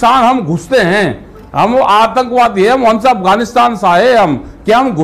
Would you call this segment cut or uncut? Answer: uncut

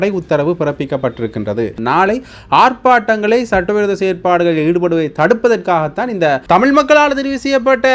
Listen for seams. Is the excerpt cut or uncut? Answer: cut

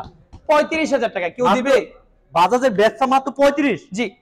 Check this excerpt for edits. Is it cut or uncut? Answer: uncut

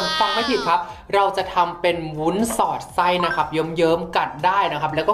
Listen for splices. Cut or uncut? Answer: uncut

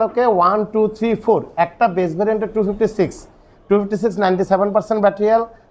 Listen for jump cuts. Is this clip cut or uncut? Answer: uncut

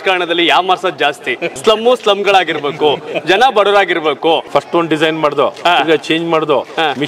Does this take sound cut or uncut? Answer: cut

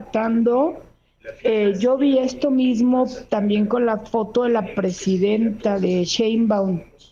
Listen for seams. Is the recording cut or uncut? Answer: uncut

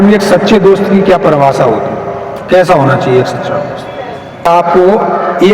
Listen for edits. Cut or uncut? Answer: cut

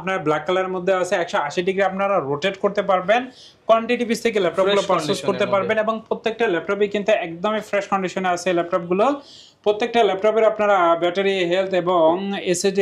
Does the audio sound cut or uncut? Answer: uncut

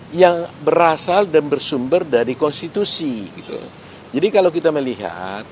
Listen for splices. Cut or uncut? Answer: uncut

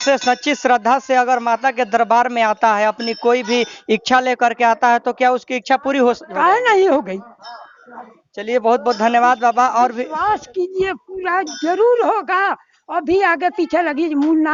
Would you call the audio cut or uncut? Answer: uncut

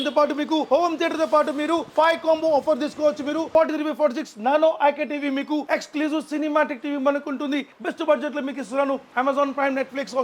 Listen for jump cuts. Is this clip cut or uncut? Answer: cut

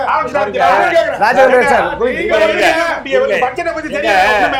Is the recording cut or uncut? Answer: uncut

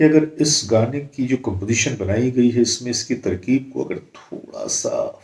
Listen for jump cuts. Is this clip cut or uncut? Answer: uncut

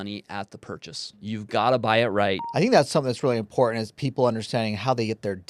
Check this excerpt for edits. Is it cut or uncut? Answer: cut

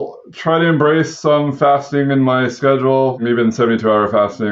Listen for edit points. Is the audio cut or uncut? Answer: cut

